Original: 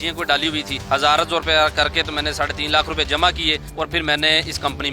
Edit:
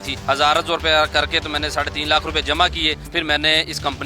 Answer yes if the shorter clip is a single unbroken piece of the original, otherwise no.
no